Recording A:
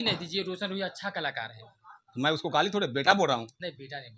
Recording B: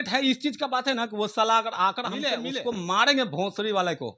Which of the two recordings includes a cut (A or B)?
B